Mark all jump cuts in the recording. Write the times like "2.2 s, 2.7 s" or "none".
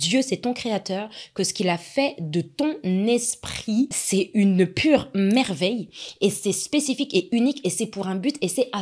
4.0 s